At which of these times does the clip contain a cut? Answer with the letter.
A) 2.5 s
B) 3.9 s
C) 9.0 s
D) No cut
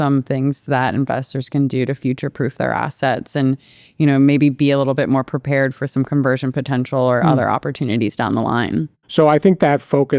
C